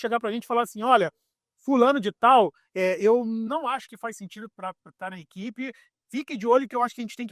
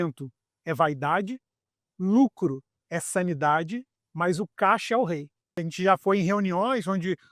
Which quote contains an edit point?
second; 1 cut; at 5.7 s

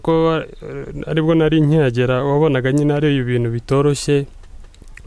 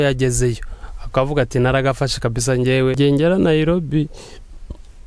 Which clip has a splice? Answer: second; 1 cut; at 3.0 s

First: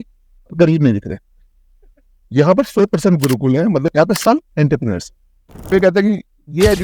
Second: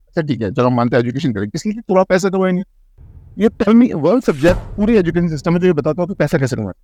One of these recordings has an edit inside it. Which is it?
first; 2 cuts; at 3.9 s, 5.7 s

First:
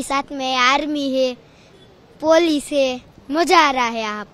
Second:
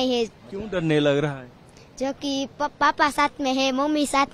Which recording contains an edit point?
first; 1 cut; at 3.1 s

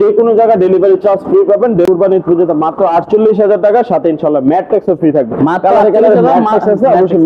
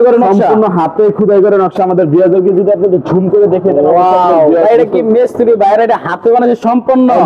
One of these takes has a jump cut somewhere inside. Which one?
first; 1 cut; at 1.9 s

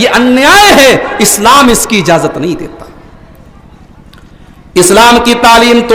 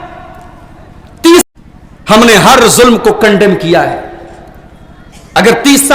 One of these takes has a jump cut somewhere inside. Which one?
second; 1 cut; at 1.4 s

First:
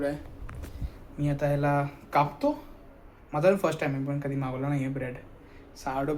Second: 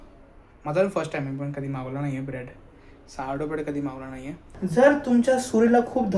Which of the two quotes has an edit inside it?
second; 1 cut; at 4.5 s

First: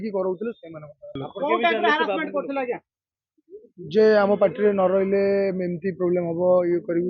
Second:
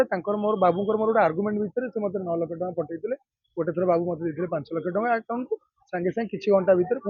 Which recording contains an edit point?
first; 1 cut; at 1.2 s

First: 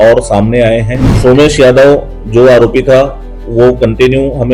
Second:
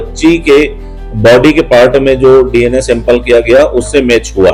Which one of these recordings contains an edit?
first; 1 cut; at 1.0 s

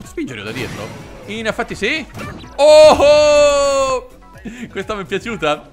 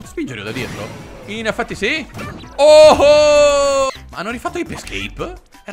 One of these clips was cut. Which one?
second; 1 cut; at 3.9 s

